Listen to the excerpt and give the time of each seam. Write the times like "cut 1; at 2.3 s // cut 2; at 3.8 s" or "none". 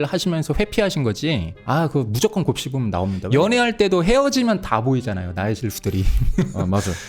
cut 1; at 3.2 s